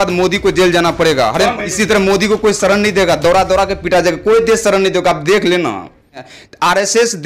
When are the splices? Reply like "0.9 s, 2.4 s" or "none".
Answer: 1.7 s, 6.3 s